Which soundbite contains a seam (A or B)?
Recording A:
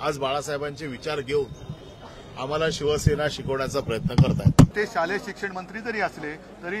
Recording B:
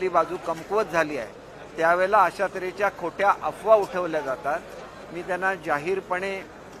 A